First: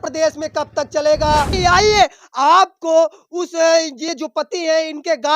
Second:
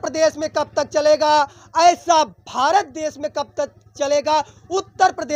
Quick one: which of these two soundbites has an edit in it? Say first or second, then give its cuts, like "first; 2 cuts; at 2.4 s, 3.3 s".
first; 1 cut; at 1.5 s